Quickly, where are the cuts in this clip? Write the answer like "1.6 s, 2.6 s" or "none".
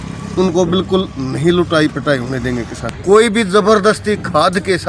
2.9 s